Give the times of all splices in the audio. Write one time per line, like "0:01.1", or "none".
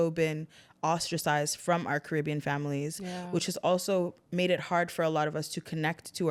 none

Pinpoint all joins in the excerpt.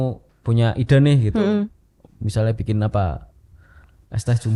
none

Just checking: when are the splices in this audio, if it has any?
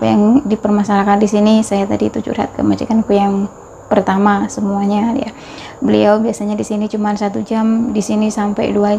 none

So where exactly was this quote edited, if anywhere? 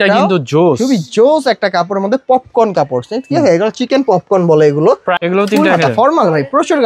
0:05.1

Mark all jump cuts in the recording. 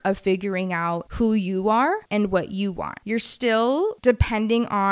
0:01.1
0:02.0
0:03.0
0:04.0

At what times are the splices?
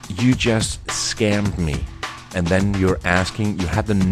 0:02.3

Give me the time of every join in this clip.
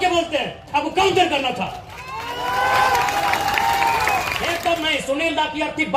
0:04.4

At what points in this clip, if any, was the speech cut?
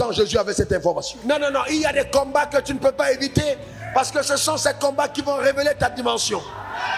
0:01.1

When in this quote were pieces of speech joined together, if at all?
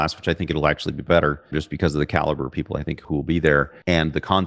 none

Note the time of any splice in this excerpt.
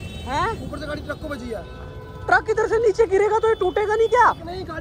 none

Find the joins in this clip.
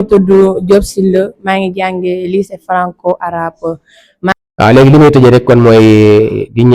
0:04.3

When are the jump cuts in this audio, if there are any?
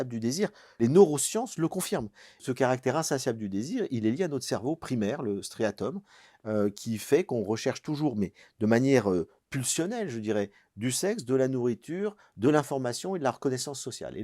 0:00.8
0:02.4

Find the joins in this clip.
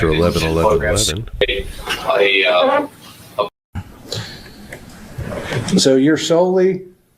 0:03.6

